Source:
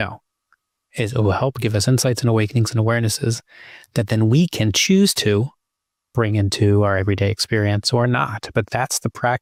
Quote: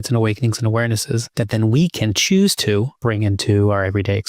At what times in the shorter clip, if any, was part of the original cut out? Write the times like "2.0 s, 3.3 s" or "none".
1.3 s, 2.9 s